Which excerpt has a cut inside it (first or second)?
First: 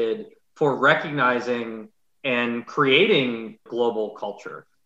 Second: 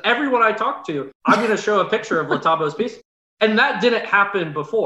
first